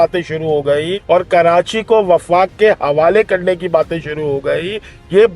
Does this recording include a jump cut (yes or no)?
yes